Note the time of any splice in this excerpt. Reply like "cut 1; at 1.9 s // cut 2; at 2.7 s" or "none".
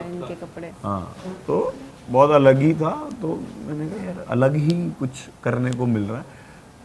none